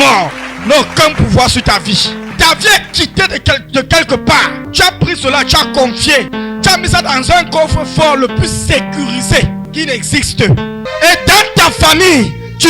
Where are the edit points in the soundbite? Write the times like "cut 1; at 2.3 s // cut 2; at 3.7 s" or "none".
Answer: cut 1; at 2.3 s // cut 2; at 4.6 s // cut 3; at 6.3 s // cut 4; at 9.7 s // cut 5; at 10.8 s